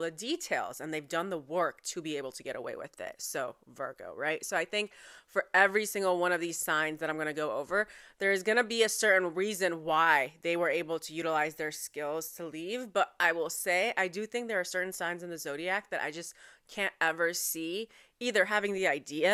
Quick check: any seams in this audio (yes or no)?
no